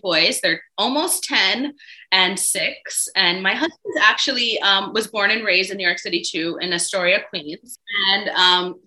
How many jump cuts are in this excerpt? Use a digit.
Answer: 1